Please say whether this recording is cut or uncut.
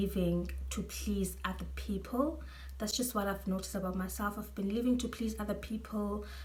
uncut